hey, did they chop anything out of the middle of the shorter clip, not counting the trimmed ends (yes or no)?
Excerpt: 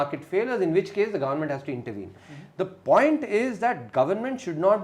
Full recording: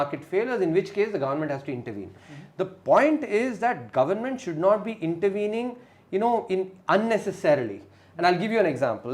no